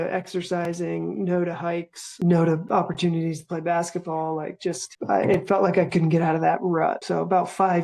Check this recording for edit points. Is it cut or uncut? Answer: uncut